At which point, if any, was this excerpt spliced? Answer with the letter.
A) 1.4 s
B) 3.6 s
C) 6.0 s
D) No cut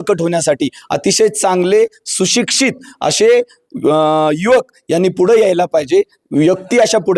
D